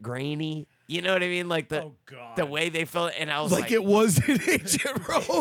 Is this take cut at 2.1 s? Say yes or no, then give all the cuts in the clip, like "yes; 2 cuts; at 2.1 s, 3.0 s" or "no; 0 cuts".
no; 0 cuts